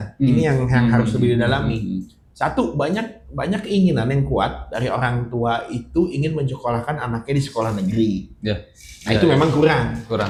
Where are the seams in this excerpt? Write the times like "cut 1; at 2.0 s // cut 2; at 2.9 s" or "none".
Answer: none